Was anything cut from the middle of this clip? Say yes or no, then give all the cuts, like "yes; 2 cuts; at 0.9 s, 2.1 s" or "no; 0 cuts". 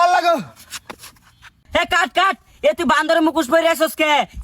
yes; 1 cut; at 1.3 s